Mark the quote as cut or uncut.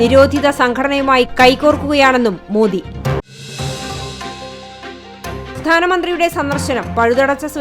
cut